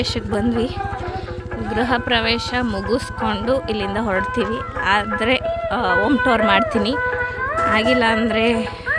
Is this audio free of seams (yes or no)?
yes